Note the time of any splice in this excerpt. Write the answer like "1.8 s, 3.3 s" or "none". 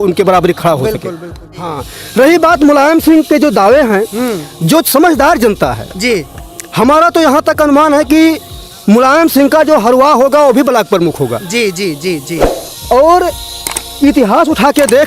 1.8 s